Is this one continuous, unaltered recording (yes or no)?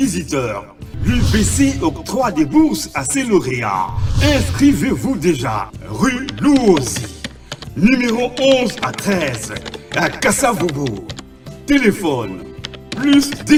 yes